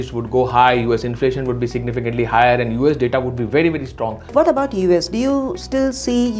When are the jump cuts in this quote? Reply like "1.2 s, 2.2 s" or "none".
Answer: 4.3 s